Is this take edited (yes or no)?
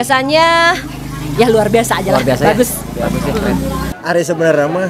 yes